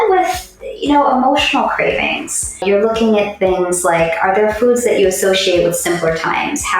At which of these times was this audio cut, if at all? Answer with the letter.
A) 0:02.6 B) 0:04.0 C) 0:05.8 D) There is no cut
A